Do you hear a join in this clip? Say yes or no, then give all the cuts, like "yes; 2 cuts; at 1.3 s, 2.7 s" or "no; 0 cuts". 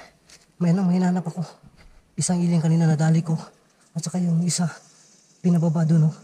no; 0 cuts